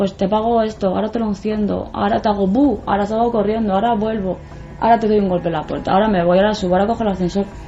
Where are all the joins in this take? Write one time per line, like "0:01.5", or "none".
none